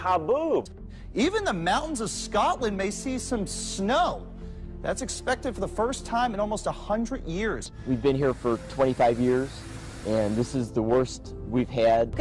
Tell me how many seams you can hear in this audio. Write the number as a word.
one